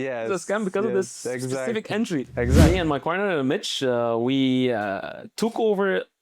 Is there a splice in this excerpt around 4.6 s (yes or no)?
no